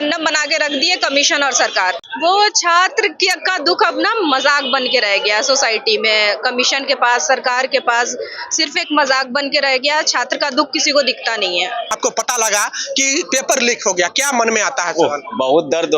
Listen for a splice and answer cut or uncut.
cut